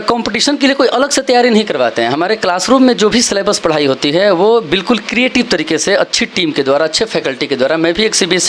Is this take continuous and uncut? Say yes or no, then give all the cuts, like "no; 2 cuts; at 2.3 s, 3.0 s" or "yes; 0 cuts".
yes; 0 cuts